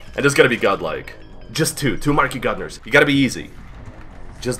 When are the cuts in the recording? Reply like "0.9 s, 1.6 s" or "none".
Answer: 2.7 s